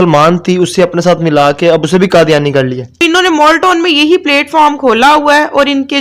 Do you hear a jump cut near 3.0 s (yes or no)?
yes